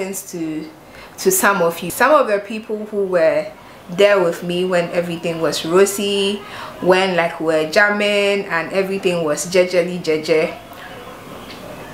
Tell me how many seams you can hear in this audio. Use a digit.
1